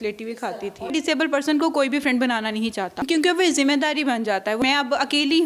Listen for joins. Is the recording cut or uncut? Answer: cut